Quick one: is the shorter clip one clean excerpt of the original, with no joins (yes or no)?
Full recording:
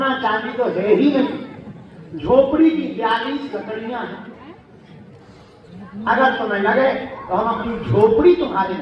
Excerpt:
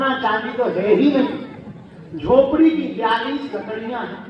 yes